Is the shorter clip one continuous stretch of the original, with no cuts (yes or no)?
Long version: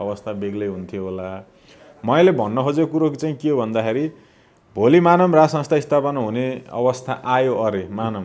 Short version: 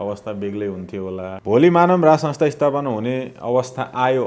no